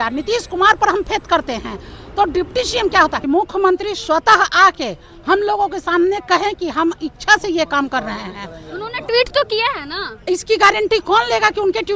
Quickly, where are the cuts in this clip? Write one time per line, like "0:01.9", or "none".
0:03.2